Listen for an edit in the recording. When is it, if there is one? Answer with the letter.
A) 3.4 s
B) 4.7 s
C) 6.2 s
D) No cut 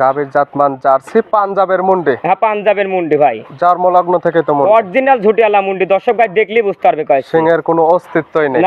D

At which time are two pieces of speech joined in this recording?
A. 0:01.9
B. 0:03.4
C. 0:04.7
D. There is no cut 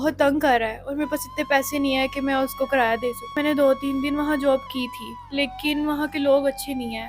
B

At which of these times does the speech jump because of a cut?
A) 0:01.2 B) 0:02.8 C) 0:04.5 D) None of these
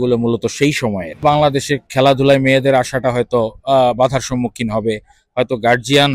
A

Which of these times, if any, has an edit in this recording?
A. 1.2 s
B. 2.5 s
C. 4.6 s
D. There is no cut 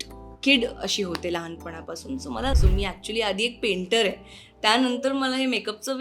B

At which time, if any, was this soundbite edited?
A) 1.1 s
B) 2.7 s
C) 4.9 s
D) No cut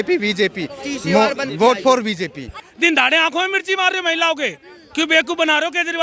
B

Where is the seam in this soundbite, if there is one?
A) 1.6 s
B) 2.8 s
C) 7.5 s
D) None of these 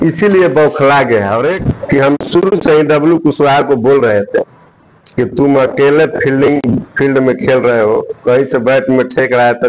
A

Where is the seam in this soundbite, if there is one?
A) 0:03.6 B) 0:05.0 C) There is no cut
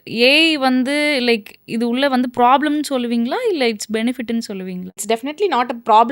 B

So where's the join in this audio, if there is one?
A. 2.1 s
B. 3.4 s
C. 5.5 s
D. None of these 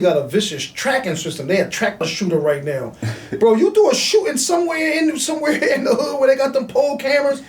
A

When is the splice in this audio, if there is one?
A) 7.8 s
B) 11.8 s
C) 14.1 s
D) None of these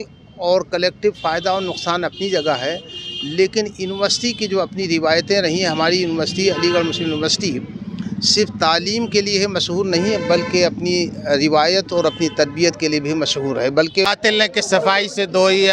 C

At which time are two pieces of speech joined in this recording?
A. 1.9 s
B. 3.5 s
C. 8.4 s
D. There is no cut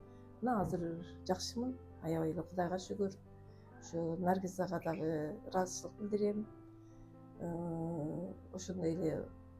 D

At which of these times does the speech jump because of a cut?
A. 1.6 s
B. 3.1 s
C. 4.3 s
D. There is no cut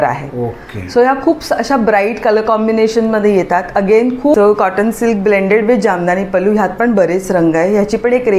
C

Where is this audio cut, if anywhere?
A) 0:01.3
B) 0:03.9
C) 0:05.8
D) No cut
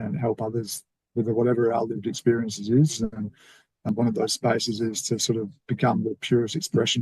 B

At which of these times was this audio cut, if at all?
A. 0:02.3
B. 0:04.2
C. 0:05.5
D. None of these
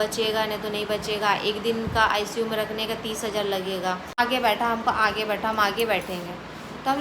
B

